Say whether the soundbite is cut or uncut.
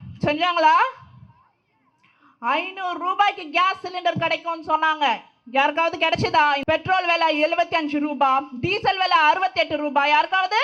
cut